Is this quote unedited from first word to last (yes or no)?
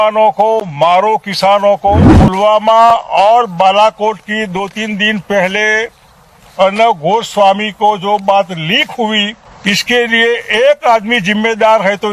no